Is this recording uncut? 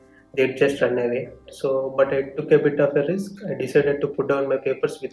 no; 1 cut; at 1.5 s

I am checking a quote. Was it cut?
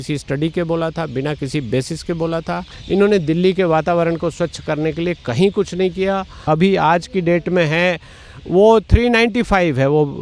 yes; 2 cuts; at 2.7 s, 6.4 s

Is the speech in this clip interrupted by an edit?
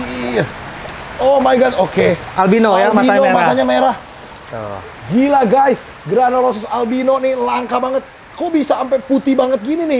no; 0 cuts

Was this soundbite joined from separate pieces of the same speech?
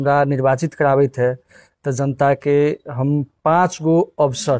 no; 0 cuts

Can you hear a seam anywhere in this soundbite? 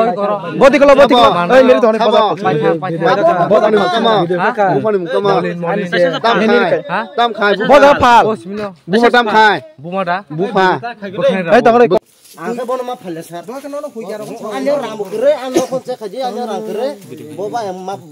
yes; 1 cut; at 12.0 s

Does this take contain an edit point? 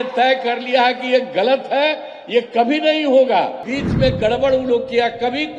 yes; 1 cut; at 3.7 s

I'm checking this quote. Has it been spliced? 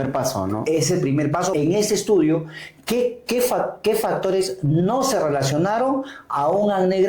yes; 1 cut; at 1.5 s

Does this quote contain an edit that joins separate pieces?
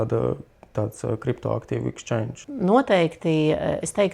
yes; 1 cut; at 2.4 s

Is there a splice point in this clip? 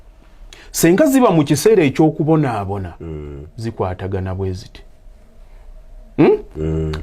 no; 0 cuts

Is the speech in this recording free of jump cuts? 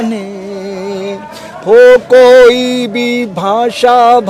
yes; 0 cuts

